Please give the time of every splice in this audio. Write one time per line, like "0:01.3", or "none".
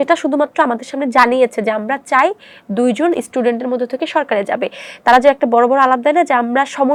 none

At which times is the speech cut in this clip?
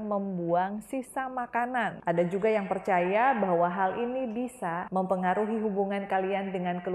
0:02.0

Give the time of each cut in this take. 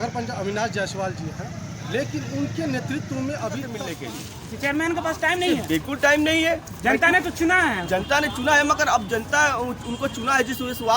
0:03.8

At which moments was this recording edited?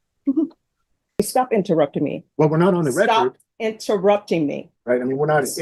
0:01.2
0:04.7

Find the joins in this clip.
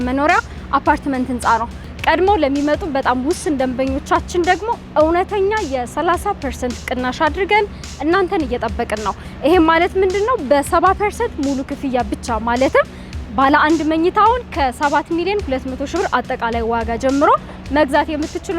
0:01.7

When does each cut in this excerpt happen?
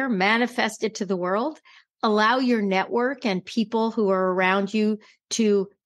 none

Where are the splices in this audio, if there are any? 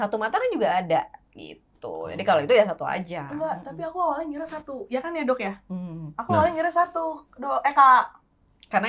none

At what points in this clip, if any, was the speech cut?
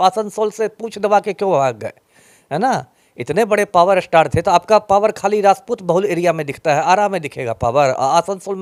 none

